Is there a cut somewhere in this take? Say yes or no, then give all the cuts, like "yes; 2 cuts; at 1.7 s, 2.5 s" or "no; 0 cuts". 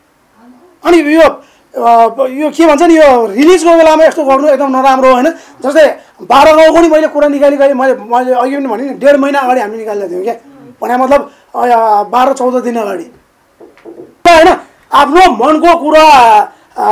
yes; 1 cut; at 14.2 s